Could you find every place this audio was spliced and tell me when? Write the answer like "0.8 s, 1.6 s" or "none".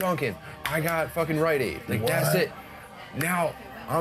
none